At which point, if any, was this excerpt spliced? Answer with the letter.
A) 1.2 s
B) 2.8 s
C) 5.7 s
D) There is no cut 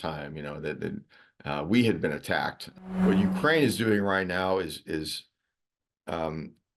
B